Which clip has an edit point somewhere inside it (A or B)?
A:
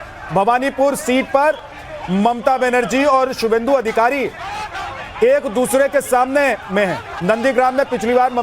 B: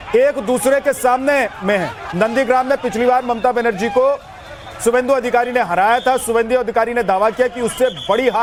A